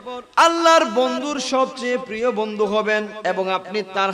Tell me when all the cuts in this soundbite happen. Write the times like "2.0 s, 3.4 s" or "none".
3.1 s